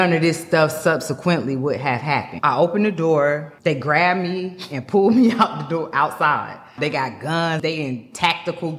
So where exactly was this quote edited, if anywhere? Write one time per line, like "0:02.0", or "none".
0:02.3
0:03.5
0:06.7
0:07.6